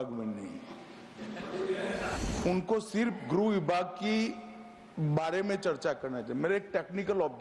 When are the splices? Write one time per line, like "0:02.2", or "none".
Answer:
0:02.2